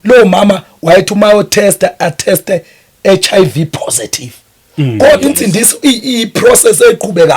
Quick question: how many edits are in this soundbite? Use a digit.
1